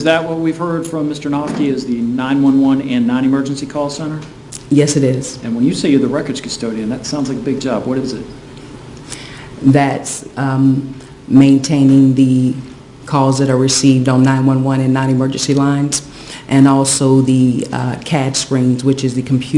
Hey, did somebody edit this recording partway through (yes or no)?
yes